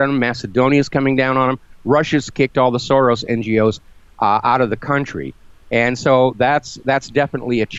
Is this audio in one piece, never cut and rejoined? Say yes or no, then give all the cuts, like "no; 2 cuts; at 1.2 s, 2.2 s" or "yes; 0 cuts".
yes; 0 cuts